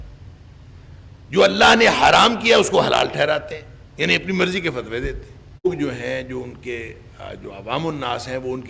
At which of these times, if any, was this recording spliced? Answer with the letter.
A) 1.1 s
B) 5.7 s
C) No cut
B